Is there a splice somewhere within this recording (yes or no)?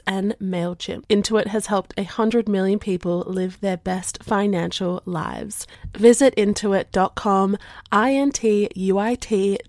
yes